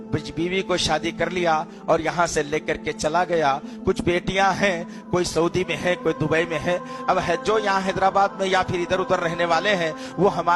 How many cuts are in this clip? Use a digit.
0